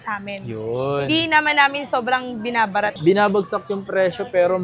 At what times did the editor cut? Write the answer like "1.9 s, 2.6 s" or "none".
2.9 s